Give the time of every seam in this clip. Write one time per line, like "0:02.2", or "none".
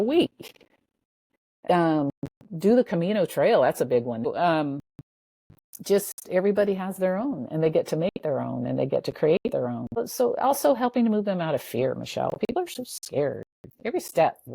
0:04.3
0:10.0